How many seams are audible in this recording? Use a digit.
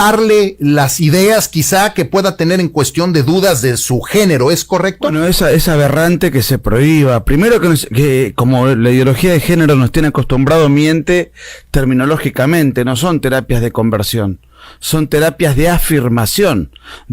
1